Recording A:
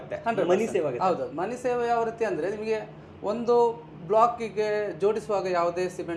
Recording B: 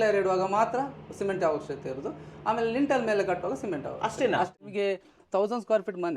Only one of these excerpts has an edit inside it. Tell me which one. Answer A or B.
B